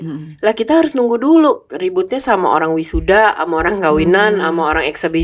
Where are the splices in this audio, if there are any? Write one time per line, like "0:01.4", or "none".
none